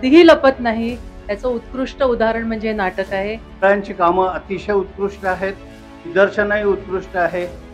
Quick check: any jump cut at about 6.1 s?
yes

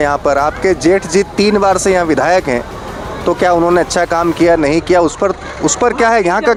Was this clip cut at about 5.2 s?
no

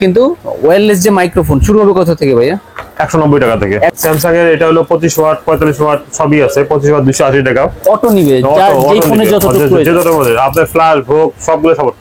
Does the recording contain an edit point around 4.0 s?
yes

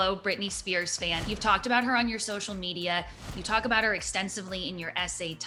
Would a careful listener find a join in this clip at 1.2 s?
no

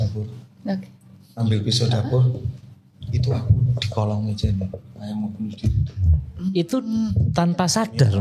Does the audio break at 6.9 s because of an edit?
no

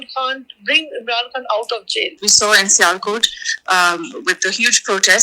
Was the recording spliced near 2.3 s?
yes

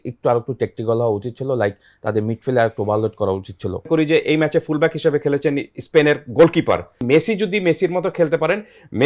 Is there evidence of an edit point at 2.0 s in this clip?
no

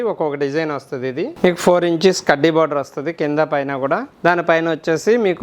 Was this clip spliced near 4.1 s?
yes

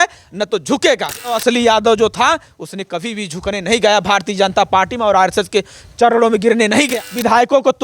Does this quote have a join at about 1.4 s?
yes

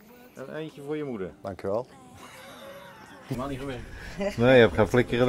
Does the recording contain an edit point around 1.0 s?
no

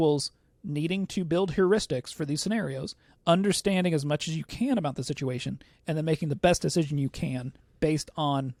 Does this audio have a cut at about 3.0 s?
no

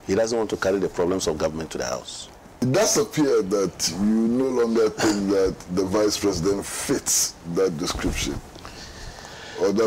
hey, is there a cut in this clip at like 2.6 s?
yes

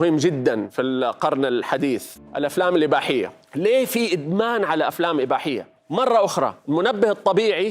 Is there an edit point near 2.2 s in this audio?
yes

